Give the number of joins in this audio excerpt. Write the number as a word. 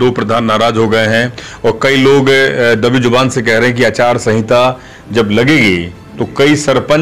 zero